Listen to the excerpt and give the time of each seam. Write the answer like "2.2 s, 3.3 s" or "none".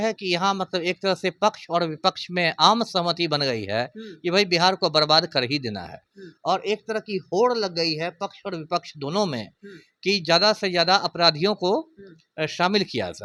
none